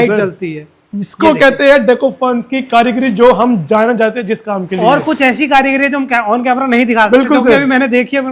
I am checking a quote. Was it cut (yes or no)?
no